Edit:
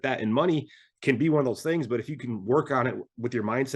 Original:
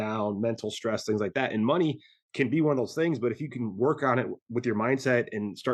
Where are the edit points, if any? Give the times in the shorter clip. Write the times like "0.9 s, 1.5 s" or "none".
none